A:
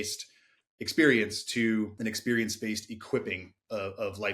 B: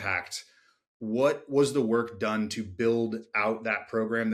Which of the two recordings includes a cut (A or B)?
A